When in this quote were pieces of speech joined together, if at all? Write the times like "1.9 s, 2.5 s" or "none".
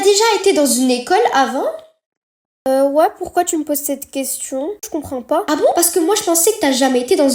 none

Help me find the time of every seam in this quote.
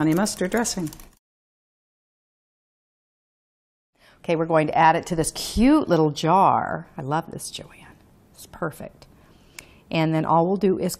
6.9 s

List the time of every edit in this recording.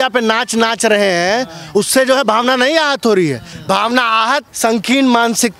3.5 s, 4.5 s

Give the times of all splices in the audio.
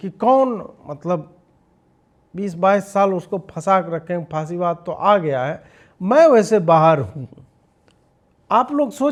none

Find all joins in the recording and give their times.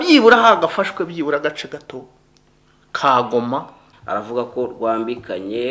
3.8 s

